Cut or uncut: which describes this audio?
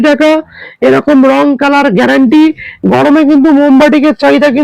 cut